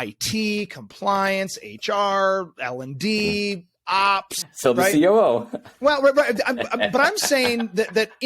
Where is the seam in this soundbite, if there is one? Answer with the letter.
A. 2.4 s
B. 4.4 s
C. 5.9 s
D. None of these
B